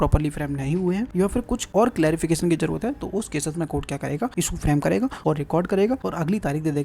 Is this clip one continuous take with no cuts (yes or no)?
no